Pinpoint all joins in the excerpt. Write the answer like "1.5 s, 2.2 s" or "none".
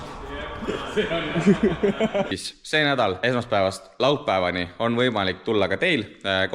2.3 s, 3.2 s